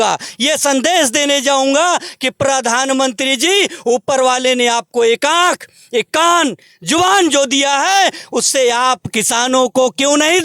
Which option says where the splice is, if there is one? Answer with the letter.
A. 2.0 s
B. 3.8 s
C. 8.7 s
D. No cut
D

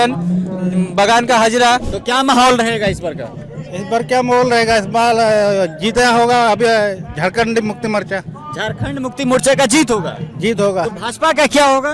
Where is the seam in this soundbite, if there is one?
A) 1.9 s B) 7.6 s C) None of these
A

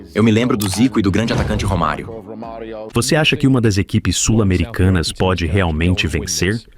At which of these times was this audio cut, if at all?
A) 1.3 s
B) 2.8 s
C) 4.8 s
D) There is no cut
B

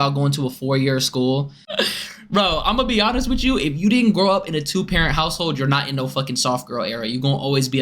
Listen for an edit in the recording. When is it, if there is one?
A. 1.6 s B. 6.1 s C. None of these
A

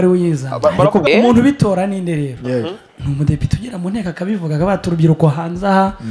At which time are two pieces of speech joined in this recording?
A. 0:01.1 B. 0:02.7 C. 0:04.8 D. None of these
A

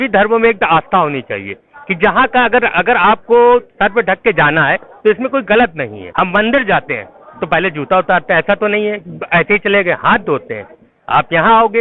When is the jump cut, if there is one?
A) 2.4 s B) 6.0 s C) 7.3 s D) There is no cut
B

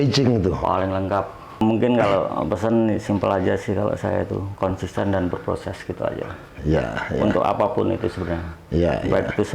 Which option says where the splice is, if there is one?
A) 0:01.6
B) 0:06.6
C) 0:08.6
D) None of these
A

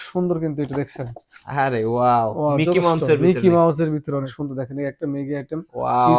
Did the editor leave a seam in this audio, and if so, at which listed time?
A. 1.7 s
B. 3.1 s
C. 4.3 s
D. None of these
C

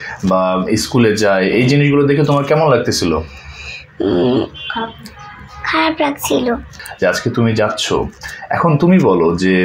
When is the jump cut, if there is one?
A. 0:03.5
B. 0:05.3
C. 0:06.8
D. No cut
C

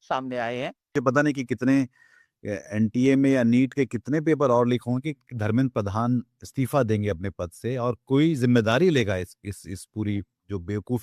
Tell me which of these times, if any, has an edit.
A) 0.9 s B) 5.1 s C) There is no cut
A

